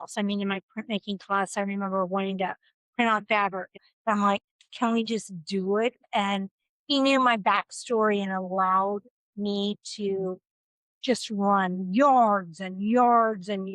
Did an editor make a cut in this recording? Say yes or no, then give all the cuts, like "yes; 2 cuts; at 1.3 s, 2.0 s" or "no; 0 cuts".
yes; 2 cuts; at 3.8 s, 6.0 s